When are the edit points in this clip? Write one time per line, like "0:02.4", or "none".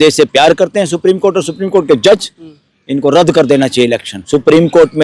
0:04.1